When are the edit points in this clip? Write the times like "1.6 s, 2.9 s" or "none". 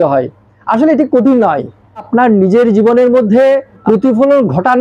2.1 s, 3.8 s